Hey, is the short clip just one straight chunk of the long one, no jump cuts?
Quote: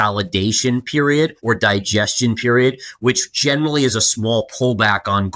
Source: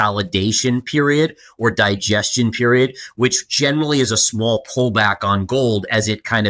no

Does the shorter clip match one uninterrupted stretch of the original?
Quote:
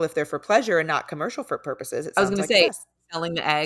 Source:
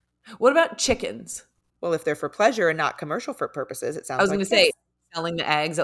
no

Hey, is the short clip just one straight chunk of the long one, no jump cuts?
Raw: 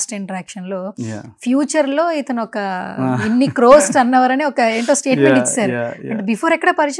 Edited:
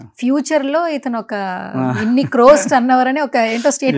yes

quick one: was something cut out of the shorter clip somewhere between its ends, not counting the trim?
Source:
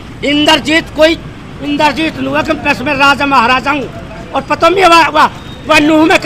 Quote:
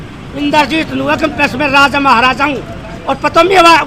no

